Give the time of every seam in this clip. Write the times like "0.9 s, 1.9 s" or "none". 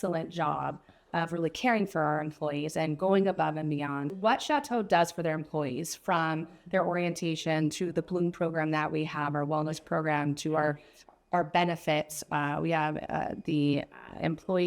4.1 s